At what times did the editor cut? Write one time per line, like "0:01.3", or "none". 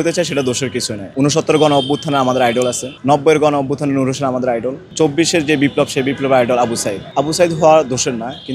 0:01.0
0:02.9
0:04.8
0:07.0